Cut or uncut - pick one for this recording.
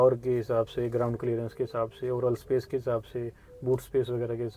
uncut